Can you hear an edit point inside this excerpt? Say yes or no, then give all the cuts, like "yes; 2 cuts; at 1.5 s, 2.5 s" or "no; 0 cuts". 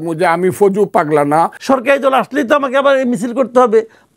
yes; 1 cut; at 1.6 s